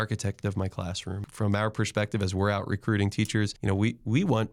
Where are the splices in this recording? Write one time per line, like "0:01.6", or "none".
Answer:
0:01.3
0:03.6